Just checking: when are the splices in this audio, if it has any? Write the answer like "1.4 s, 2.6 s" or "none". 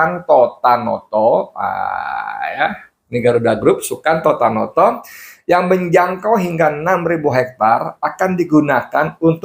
none